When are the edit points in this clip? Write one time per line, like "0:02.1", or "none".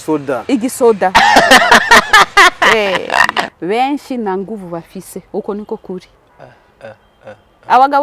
0:03.4